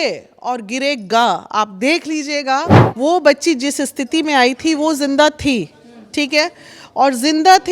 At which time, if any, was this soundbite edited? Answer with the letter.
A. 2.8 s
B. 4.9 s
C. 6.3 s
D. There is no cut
A